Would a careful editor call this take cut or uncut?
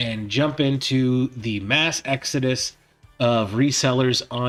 uncut